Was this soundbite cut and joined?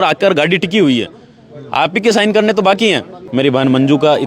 yes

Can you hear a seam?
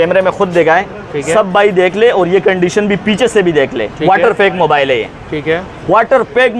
no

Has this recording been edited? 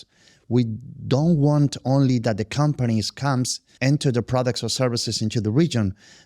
yes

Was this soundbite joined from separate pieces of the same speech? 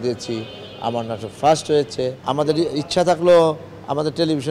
yes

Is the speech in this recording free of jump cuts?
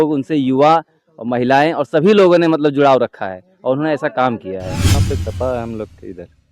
no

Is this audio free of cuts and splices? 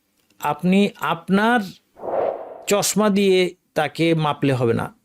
yes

